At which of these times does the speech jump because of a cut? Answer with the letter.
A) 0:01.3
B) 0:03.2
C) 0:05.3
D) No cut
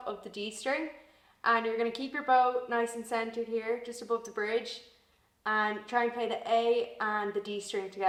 D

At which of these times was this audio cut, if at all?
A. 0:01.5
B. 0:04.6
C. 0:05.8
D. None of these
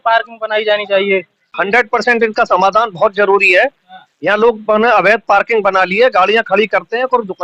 A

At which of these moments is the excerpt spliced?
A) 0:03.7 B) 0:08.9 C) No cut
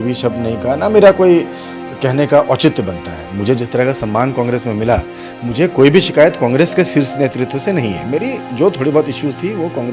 C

